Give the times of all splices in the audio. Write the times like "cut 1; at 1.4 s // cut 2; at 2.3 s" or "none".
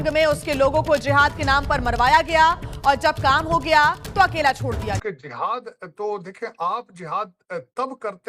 cut 1; at 5.0 s

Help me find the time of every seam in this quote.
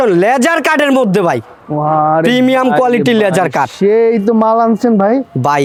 none

